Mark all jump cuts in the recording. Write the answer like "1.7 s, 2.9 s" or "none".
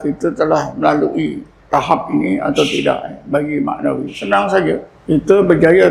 1.5 s, 4.2 s, 4.9 s

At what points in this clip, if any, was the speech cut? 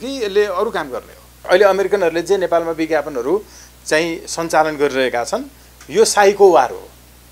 1.4 s

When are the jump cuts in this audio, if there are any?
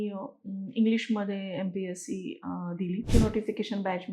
3.1 s

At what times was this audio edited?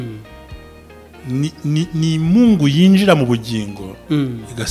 none

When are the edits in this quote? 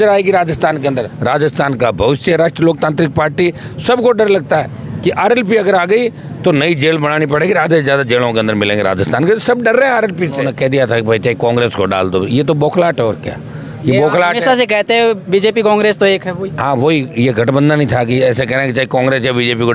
1.1 s, 10.4 s

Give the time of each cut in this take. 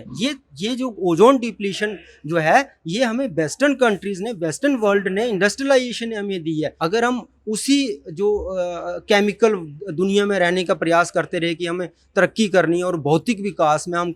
6.7 s

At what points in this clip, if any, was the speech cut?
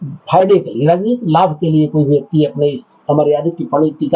none

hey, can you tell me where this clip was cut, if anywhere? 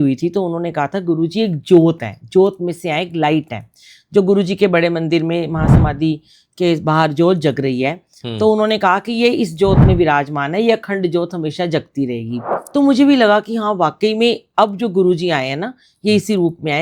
12.5 s

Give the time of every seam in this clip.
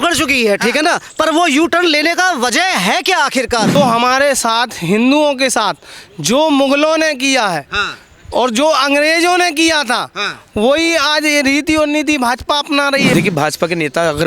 3.8 s, 13.1 s

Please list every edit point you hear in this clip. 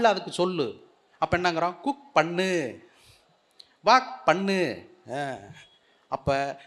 none

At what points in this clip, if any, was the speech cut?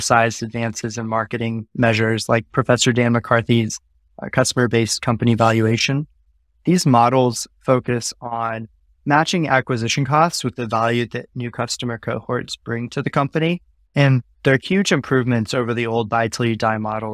13.8 s

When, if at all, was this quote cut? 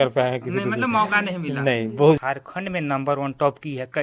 2.2 s

